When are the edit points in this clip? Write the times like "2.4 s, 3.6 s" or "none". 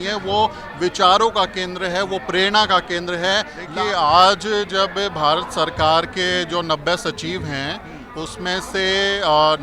3.6 s